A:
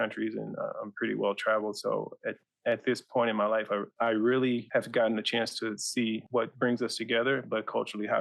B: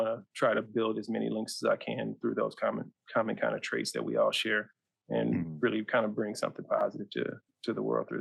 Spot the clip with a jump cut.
A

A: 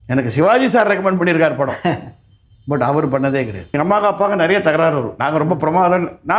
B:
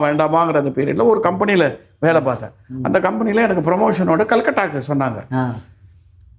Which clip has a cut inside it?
A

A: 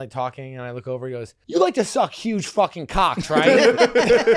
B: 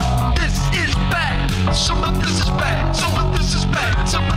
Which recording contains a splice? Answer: A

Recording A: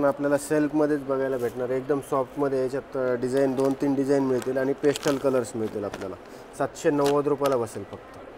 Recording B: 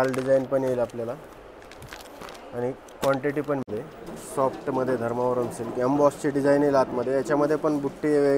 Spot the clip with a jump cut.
B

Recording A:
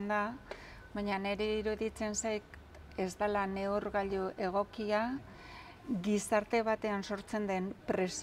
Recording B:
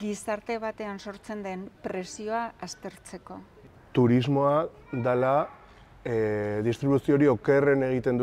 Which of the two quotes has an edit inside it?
B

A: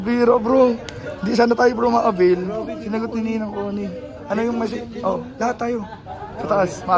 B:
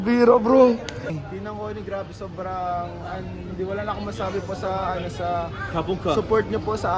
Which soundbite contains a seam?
B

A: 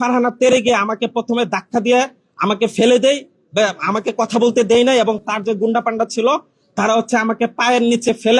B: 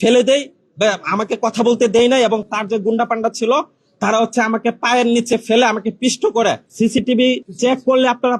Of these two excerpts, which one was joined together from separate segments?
B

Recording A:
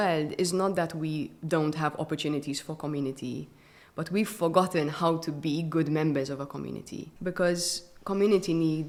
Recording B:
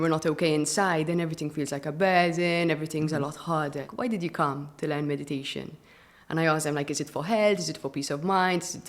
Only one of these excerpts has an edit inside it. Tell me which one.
B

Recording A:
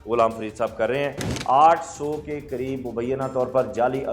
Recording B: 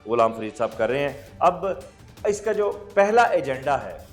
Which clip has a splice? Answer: A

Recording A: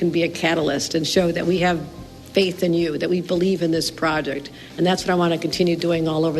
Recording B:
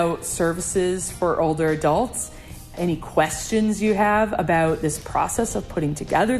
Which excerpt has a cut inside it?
B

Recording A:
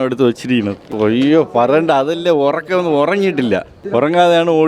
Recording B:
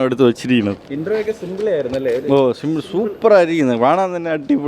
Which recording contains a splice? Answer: A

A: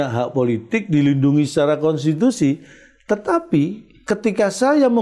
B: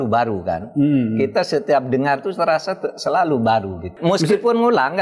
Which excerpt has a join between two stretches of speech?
B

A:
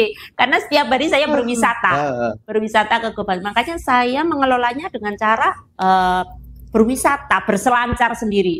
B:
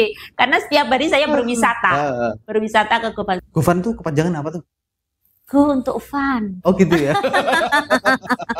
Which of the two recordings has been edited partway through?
B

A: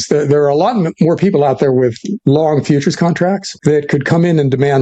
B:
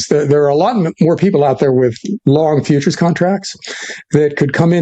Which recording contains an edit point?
A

